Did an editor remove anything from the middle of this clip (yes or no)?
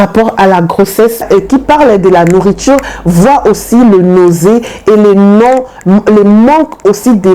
yes